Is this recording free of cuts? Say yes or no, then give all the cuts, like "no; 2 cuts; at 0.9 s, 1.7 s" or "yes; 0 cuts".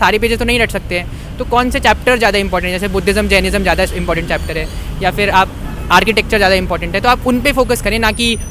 yes; 0 cuts